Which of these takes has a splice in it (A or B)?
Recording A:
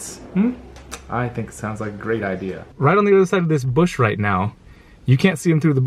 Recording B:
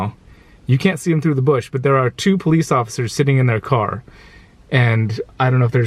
A